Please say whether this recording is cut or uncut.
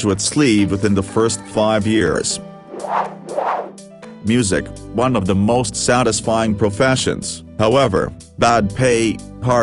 cut